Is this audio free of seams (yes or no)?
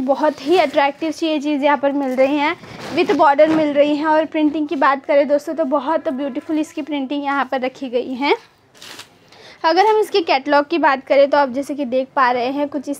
yes